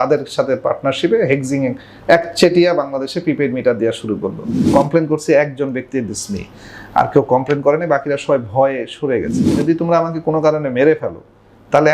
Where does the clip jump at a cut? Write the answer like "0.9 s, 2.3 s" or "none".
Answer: 4.6 s, 9.5 s